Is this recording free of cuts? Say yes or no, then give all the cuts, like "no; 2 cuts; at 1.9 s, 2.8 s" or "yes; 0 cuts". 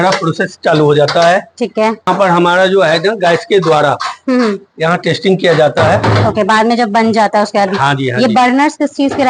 yes; 0 cuts